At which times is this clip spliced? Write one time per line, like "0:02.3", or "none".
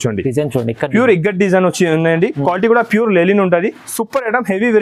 none